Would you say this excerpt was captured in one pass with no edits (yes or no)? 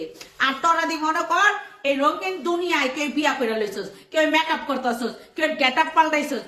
yes